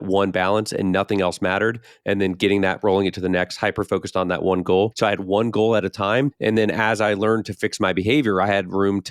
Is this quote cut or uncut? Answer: cut